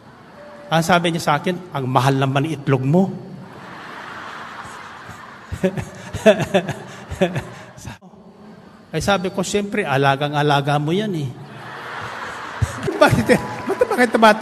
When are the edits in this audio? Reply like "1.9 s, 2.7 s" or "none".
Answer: 8.0 s, 12.9 s